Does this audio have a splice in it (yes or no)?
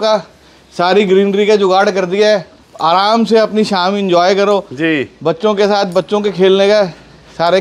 no